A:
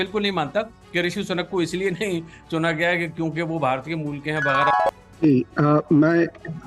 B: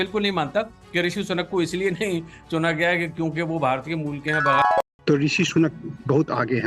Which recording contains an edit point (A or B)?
B